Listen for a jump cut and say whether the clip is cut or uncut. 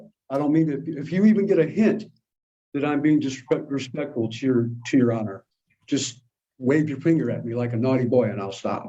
uncut